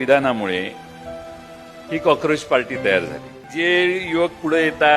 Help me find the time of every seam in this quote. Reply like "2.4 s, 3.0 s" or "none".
3.4 s